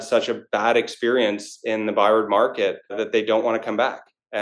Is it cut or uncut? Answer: cut